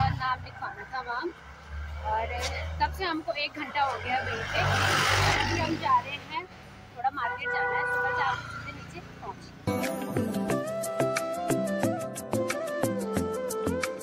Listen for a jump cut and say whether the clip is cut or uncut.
uncut